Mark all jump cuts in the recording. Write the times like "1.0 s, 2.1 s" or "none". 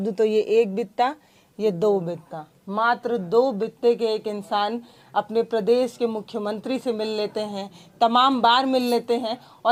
none